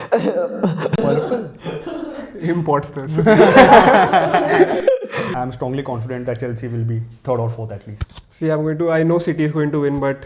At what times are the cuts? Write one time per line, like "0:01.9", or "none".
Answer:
0:05.3